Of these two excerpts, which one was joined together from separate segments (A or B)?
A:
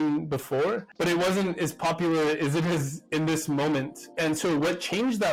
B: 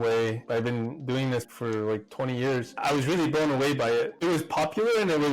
B